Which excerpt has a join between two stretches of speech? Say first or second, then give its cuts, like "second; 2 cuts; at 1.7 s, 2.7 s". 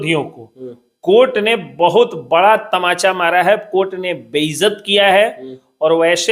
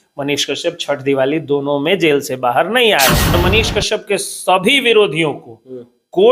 second; 1 cut; at 3.3 s